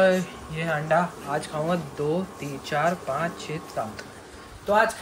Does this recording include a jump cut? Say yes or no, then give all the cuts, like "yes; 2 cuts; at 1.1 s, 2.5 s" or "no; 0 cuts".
no; 0 cuts